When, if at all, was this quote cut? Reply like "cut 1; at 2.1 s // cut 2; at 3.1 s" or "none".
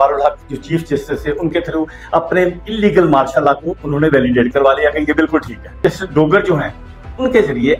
cut 1; at 5.8 s